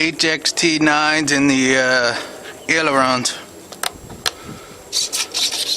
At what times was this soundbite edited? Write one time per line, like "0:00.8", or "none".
0:03.9